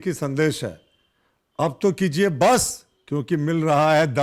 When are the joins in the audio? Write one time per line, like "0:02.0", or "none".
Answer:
none